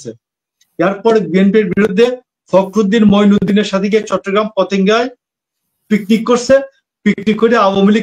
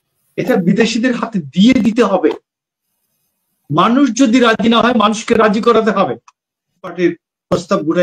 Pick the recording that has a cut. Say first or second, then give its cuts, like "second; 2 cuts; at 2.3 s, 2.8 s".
second; 1 cut; at 6.9 s